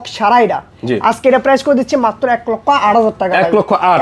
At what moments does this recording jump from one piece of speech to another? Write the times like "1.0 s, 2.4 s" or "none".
none